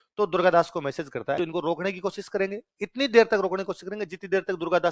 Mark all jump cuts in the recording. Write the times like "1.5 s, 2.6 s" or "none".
1.4 s